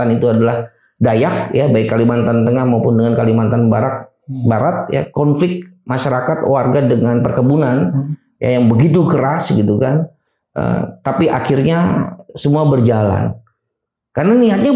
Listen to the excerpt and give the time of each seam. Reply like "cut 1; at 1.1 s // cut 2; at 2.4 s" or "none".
none